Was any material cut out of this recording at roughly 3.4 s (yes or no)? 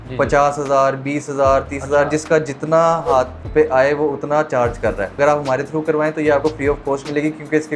yes